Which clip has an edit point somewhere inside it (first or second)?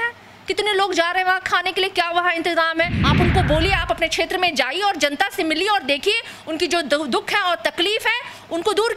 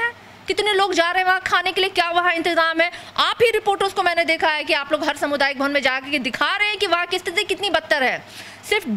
first